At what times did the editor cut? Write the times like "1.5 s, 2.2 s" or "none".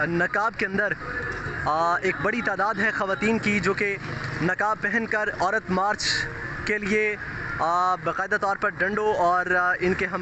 none

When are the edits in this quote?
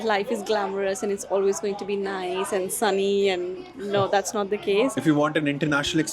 5.0 s

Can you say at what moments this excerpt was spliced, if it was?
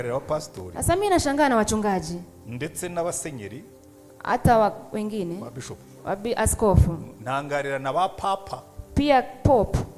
0.9 s

